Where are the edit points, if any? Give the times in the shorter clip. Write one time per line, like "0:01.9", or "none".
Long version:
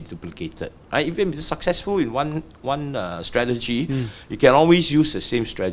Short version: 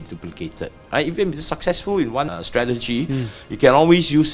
0:02.3